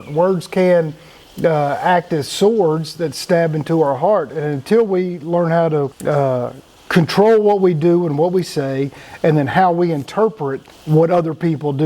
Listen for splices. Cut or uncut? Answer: uncut